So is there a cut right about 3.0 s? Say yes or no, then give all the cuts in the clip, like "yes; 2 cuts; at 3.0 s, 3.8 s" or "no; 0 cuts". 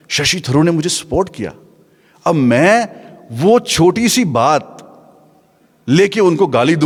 no; 0 cuts